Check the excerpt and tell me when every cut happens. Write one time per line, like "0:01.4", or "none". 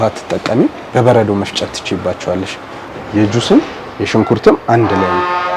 0:02.9